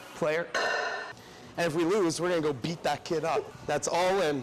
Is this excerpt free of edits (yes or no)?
no